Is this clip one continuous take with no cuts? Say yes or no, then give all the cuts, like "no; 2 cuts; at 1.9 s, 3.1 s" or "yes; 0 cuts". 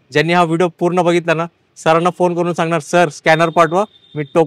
yes; 0 cuts